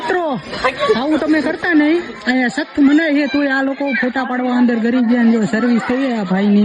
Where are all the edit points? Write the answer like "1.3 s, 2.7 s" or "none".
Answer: none